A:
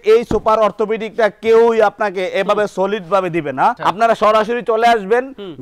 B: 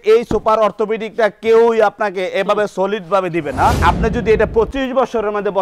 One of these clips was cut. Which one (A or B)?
B